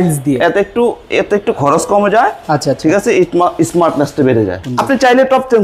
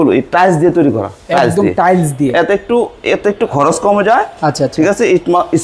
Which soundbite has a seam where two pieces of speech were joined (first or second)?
first